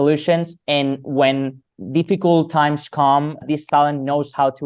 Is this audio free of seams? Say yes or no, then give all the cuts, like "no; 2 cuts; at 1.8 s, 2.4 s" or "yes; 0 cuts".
no; 2 cuts; at 1.7 s, 3.4 s